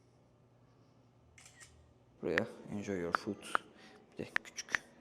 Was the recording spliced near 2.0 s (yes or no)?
yes